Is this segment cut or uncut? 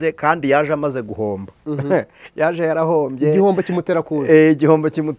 uncut